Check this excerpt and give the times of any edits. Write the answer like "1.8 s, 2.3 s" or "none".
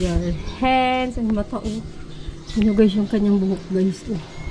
none